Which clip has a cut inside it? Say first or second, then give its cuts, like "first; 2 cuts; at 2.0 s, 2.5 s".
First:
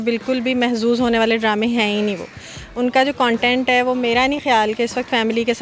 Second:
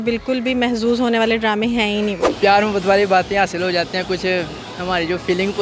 second; 1 cut; at 2.2 s